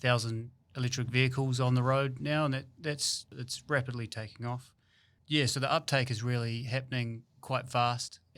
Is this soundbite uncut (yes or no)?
no